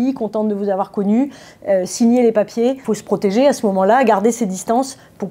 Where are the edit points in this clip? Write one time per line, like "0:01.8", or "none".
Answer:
0:02.9